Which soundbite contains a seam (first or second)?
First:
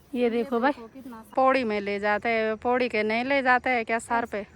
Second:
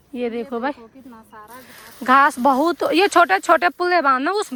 first